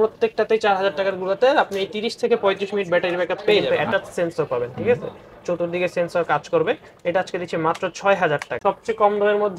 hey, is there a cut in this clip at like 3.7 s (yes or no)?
yes